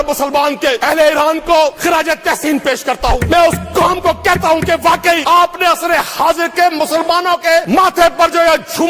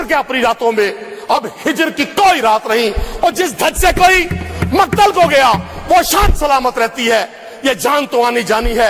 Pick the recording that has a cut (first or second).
first